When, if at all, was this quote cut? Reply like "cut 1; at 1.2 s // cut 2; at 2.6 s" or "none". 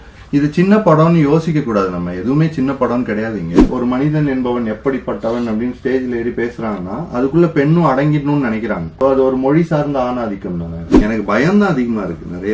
cut 1; at 3.7 s // cut 2; at 8.9 s // cut 3; at 11.0 s